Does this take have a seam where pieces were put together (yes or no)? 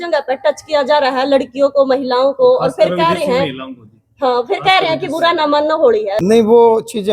yes